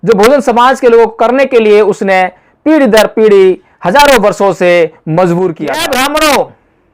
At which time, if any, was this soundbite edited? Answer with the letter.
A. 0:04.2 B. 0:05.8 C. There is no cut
B